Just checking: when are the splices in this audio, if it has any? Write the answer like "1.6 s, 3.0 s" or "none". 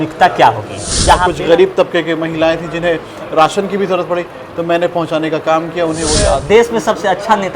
1.2 s, 6.3 s